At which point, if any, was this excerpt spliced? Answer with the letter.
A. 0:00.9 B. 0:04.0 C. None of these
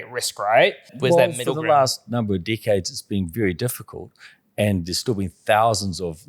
A